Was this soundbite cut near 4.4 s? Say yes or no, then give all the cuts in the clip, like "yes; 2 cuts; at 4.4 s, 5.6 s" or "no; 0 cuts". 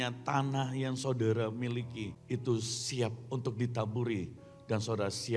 no; 1 cut; at 2.1 s